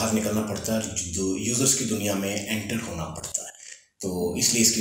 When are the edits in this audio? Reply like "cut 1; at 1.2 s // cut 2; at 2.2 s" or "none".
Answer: none